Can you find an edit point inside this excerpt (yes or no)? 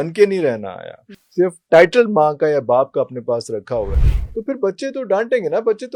no